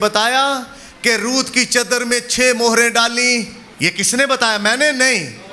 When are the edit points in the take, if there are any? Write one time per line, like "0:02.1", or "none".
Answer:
0:03.6